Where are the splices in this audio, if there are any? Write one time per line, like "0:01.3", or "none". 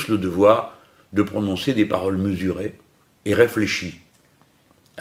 none